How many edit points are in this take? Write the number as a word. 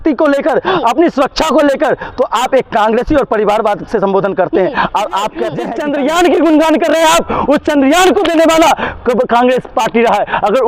one